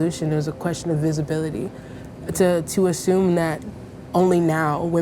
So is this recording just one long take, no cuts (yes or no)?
yes